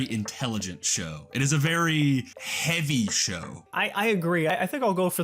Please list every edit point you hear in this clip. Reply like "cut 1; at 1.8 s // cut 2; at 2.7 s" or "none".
cut 1; at 2.4 s // cut 2; at 3.7 s // cut 3; at 4.5 s